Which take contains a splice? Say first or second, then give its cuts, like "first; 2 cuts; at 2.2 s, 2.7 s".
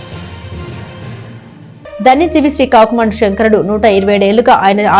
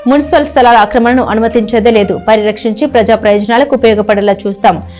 first; 1 cut; at 1.2 s